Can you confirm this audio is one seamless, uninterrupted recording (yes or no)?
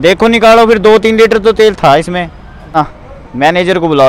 no